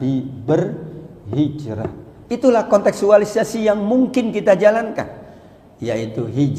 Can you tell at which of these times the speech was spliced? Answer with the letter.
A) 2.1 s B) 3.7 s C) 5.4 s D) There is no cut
A